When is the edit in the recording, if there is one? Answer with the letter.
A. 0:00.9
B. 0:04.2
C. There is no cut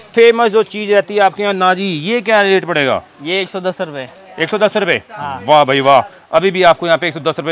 C